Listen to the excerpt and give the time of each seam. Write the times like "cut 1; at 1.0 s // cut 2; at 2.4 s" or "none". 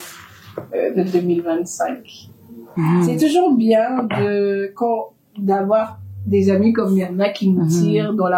cut 1; at 2.7 s